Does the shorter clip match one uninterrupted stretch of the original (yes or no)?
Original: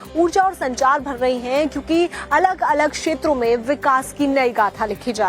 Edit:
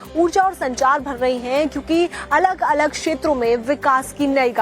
yes